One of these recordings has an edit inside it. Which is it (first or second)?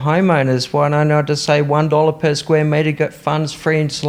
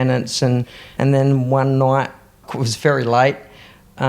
second